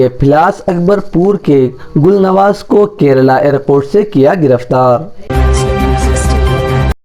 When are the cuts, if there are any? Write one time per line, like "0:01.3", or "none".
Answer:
0:05.3